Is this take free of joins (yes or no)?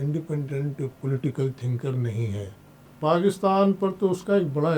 no